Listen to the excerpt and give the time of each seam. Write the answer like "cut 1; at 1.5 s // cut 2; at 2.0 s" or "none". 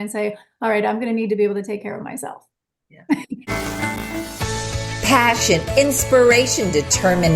cut 1; at 3.4 s